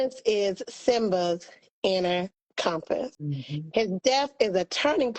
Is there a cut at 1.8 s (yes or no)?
no